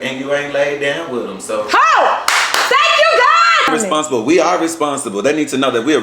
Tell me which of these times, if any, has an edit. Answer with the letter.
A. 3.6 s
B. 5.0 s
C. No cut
A